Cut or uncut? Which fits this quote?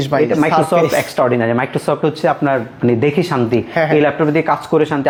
uncut